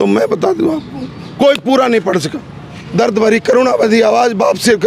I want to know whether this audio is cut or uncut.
cut